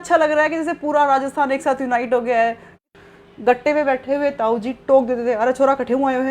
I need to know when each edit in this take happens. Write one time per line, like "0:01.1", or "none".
0:02.8